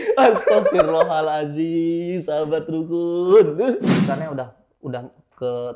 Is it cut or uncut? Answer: cut